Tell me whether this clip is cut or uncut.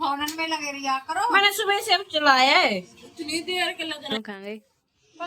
cut